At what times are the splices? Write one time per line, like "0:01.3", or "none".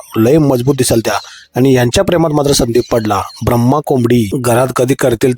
0:04.3